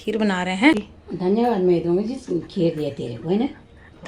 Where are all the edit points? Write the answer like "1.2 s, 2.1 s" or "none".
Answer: 0.9 s